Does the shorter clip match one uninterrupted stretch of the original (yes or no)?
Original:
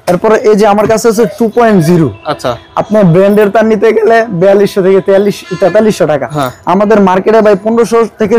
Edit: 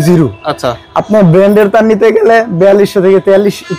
yes